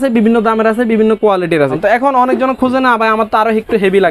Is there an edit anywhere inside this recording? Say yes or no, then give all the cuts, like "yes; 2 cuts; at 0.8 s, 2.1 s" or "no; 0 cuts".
yes; 1 cut; at 1.8 s